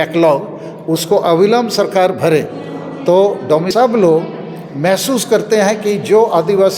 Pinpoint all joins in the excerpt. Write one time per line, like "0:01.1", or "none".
0:03.7